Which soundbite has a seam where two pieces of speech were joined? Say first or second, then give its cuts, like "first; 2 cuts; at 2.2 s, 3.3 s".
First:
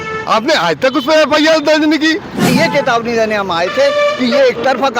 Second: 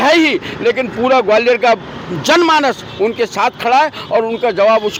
first; 1 cut; at 2.5 s